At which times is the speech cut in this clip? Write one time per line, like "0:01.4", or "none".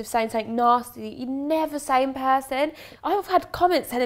0:02.8

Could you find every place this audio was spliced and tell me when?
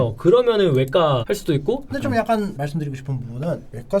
0:01.9

